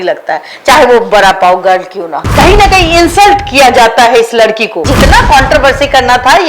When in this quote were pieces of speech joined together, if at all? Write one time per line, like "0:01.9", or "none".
0:02.3
0:04.9

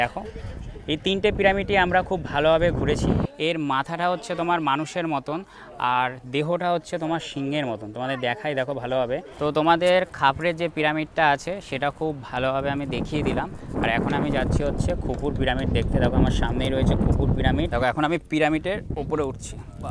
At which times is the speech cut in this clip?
0:03.3
0:09.3
0:17.7

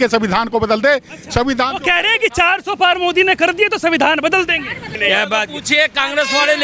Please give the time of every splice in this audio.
0:05.0

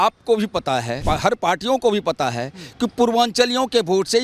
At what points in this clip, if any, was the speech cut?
0:01.0

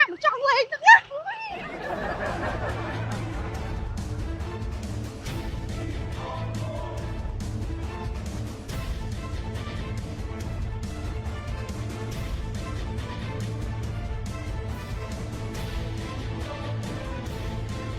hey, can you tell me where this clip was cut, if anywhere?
none

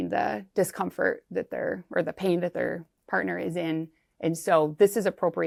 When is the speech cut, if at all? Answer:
none

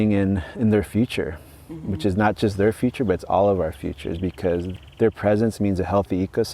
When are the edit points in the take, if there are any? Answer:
0:04.7

